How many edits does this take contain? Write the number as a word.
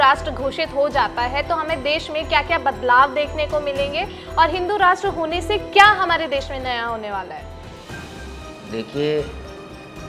zero